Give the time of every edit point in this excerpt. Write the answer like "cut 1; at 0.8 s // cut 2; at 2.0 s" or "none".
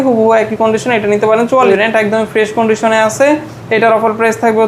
cut 1; at 1.7 s